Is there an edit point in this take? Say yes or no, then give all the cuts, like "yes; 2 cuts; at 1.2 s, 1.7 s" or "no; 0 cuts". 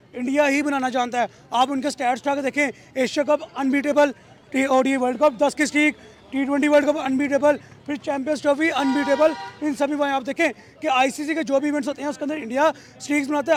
no; 0 cuts